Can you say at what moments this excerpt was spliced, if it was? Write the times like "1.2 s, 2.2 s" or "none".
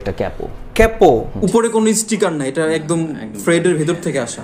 1.3 s